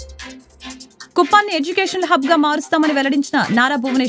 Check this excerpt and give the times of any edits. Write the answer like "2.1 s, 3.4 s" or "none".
none